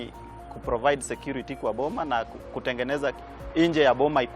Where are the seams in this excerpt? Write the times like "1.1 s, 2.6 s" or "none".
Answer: 3.3 s